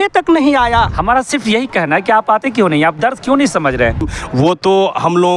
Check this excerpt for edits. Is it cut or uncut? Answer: cut